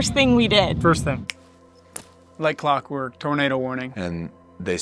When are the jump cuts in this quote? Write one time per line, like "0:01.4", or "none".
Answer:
0:01.3
0:03.9